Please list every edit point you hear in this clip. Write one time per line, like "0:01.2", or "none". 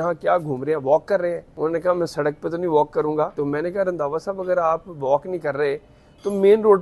0:01.5
0:03.4